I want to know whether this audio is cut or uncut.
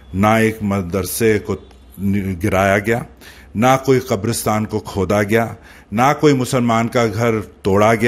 uncut